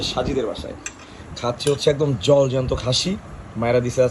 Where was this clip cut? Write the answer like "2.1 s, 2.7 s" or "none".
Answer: none

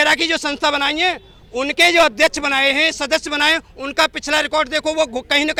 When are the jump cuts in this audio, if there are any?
none

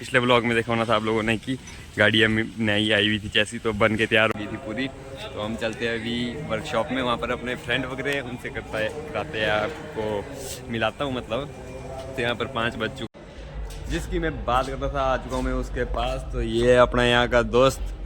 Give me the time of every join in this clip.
4.3 s, 13.1 s

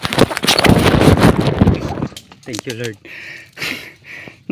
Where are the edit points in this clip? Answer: 1.9 s

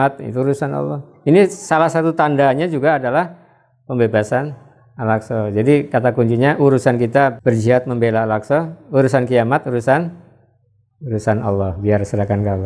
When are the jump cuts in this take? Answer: 7.4 s

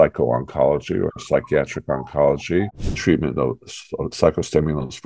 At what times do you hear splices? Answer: 3.0 s

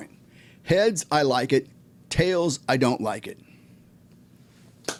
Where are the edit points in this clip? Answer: none

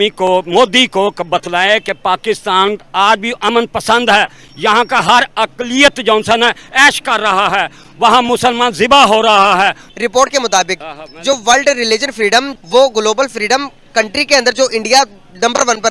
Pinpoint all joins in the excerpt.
9.9 s, 12.5 s

